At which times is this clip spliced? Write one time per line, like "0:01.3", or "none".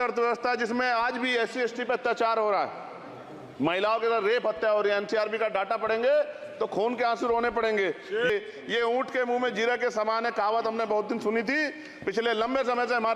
0:08.3